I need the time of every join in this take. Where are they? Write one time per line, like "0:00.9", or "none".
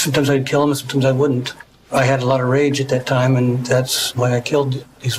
0:04.0